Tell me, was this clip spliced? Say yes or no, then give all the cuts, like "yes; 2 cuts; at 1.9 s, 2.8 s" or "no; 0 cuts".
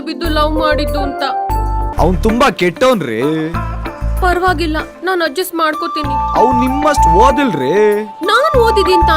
yes; 1 cut; at 1.9 s